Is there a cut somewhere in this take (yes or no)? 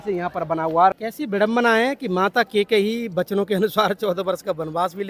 yes